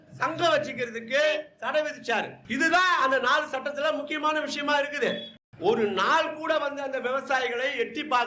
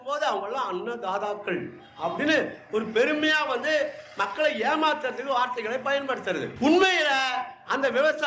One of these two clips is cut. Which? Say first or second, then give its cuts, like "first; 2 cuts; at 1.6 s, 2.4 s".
first; 1 cut; at 5.3 s